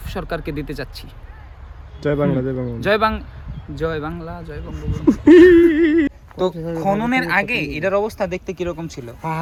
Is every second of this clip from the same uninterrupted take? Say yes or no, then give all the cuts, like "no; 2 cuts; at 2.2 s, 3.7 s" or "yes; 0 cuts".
yes; 0 cuts